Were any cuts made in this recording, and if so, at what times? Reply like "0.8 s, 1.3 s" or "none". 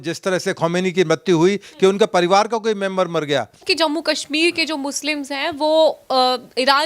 3.6 s